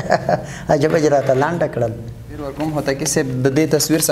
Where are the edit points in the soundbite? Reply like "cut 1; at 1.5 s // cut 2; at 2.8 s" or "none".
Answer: cut 1; at 2.5 s